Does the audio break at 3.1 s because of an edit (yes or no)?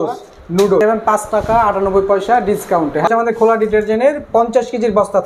yes